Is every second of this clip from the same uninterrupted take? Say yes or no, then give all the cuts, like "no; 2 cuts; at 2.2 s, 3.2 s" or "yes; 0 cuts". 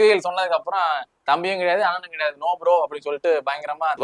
yes; 0 cuts